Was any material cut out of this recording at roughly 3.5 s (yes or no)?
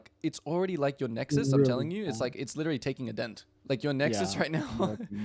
yes